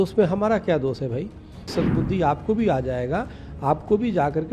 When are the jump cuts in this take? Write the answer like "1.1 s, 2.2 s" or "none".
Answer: 1.7 s